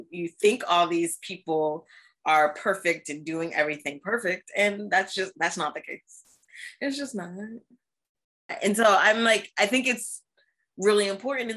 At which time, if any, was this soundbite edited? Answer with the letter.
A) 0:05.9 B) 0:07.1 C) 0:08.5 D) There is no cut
C